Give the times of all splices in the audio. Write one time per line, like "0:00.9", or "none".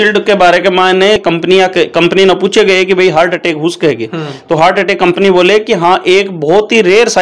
0:01.2